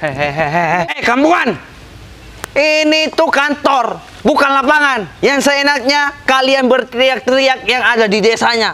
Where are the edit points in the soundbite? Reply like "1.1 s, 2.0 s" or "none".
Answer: 0.9 s